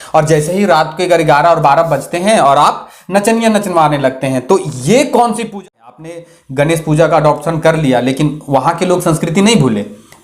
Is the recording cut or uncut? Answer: cut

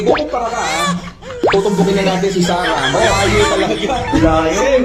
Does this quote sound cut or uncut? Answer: uncut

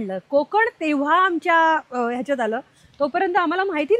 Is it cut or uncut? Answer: uncut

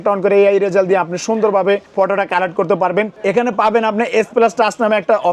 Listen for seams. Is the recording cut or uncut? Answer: cut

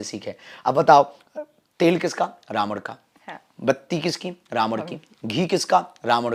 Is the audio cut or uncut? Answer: uncut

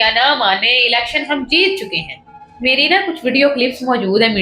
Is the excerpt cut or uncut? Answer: uncut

